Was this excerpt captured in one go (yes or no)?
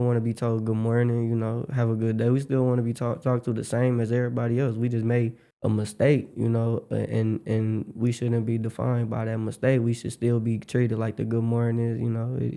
yes